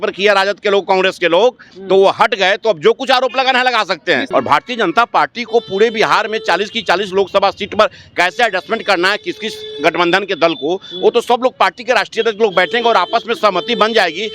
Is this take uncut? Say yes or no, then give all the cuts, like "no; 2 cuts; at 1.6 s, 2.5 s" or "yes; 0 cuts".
no; 1 cut; at 4.2 s